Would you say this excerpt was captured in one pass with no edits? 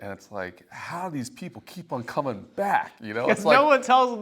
yes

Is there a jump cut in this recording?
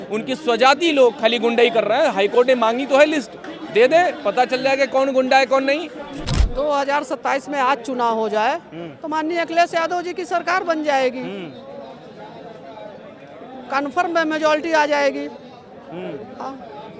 no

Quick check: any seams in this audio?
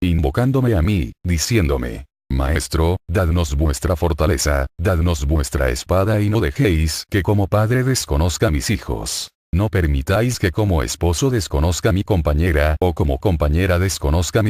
yes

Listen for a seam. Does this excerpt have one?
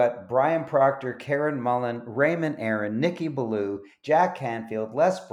no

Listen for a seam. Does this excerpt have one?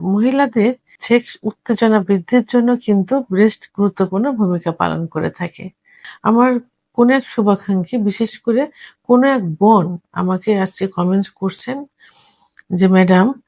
yes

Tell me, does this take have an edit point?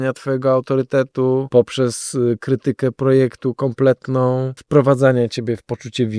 yes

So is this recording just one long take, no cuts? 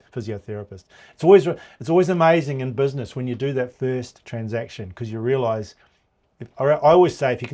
yes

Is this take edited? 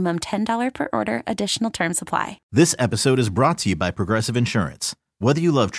yes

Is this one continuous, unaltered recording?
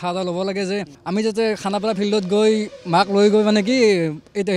no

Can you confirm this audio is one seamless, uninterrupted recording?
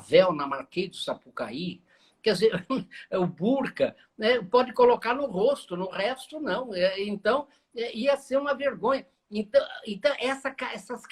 yes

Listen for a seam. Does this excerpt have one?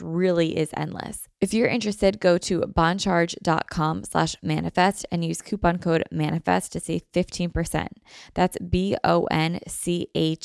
yes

